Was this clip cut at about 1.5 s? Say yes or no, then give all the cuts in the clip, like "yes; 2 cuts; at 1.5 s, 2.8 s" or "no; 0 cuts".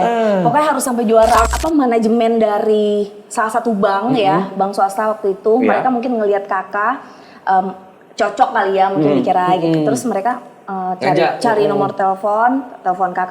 yes; 1 cut; at 1.5 s